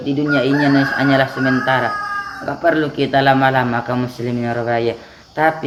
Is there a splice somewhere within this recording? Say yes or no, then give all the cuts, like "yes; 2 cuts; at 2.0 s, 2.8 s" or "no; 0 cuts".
no; 0 cuts